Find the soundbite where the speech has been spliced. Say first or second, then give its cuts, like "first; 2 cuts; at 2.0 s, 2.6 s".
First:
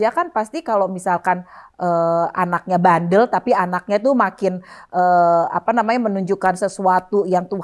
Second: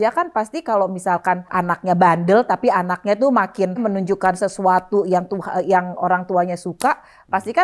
second; 2 cuts; at 1.5 s, 3.8 s